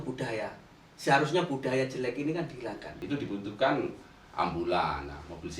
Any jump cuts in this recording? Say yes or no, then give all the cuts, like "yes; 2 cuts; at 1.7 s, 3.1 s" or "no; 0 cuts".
yes; 1 cut; at 2.9 s